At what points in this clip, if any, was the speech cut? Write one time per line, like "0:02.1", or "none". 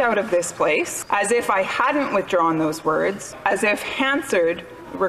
0:01.0
0:03.3

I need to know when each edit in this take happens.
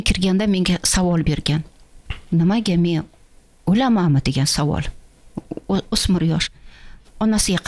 none

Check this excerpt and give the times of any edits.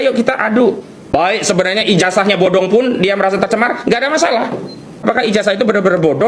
0:00.9
0:04.9

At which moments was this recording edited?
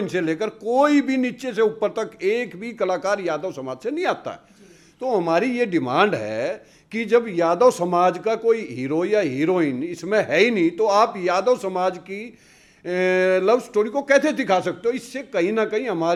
none

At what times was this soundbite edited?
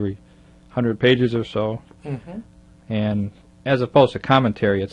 none

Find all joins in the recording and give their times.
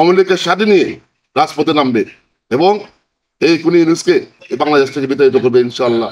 none

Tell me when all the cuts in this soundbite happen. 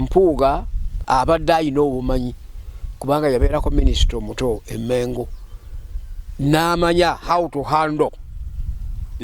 0:01.0

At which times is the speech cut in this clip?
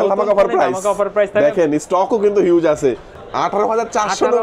0:03.1

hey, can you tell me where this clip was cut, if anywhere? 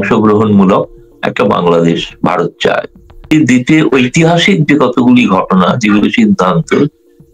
0:03.3

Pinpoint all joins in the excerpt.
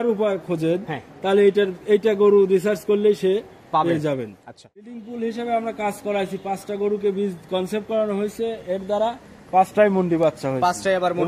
0:04.9

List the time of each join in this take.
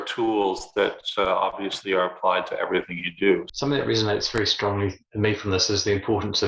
0:03.5

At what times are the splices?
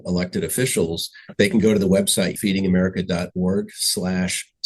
0:02.3

